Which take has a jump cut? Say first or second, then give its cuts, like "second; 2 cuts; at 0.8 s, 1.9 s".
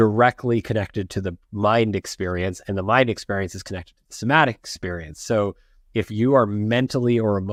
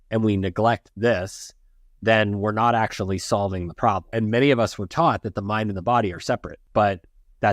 second; 2 cuts; at 4.1 s, 6.6 s